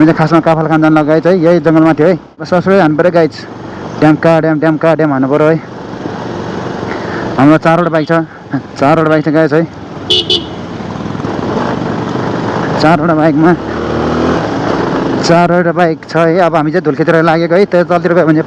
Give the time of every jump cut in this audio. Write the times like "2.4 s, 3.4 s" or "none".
2.5 s